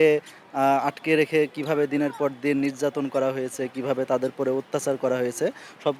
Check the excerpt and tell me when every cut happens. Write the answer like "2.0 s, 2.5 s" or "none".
none